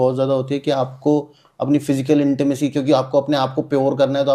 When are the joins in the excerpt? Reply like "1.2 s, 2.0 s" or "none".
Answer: none